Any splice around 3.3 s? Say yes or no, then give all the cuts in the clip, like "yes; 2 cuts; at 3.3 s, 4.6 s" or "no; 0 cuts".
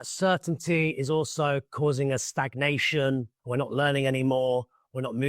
yes; 1 cut; at 3.3 s